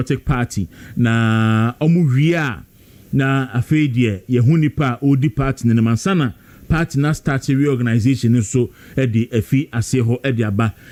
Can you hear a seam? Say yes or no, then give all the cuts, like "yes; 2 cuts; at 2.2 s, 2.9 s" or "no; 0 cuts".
no; 0 cuts